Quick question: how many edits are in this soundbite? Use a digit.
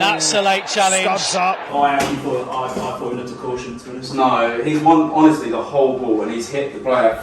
1